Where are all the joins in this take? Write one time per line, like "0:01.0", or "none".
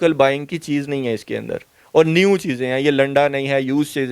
none

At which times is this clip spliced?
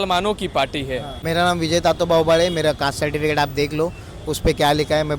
0:01.1

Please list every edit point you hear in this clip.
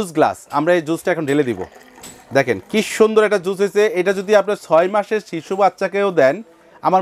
none

